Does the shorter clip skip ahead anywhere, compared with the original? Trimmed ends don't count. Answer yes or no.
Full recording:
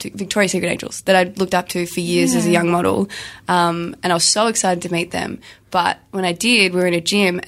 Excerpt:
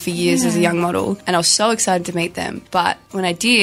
yes